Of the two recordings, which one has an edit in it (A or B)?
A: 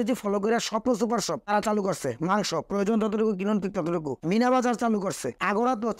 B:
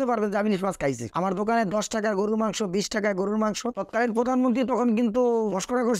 B